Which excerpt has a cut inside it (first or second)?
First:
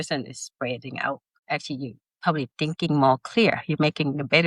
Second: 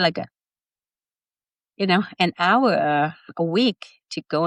first